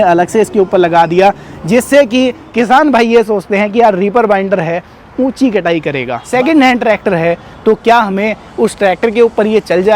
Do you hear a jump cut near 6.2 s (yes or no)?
yes